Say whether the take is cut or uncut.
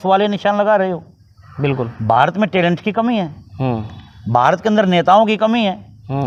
uncut